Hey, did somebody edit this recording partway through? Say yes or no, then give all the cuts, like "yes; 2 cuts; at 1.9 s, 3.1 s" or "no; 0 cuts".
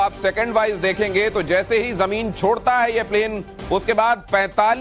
no; 0 cuts